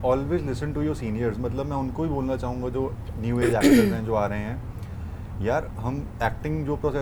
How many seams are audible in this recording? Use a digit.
0